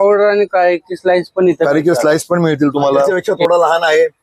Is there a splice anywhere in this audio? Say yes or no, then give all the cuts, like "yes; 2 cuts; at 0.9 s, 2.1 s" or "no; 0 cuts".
yes; 1 cut; at 3.1 s